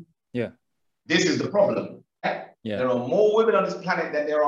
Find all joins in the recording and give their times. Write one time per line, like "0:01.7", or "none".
0:02.3